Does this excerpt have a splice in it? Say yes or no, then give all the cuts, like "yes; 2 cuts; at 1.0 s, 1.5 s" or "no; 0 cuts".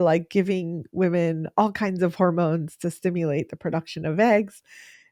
no; 0 cuts